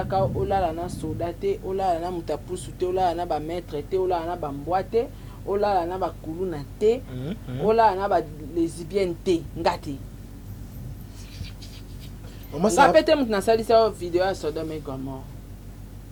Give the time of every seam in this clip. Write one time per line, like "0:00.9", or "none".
none